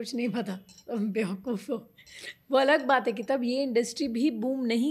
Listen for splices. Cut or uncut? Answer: uncut